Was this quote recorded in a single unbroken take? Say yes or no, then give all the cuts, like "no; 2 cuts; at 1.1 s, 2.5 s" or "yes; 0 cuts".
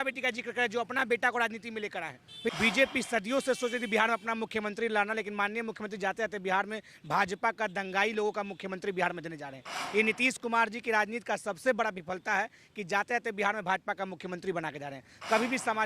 no; 1 cut; at 2.5 s